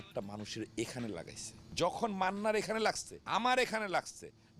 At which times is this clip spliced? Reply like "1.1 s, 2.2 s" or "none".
1.6 s, 3.1 s

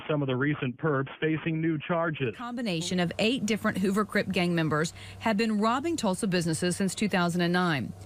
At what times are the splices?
2.6 s

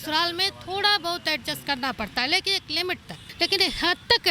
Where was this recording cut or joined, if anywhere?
3.2 s

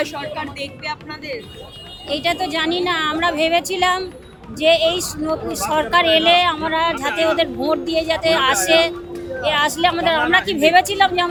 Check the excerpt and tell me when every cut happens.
none

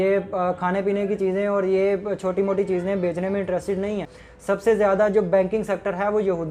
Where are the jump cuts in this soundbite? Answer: 4.1 s

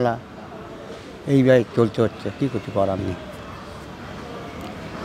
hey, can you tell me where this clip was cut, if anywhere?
none

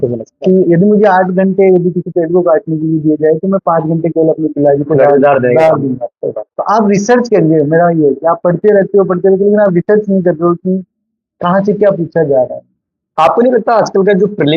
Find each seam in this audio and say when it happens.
none

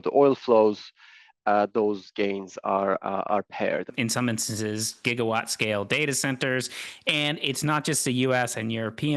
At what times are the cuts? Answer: 3.9 s

